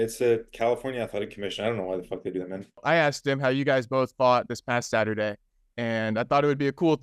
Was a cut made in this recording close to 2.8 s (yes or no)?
yes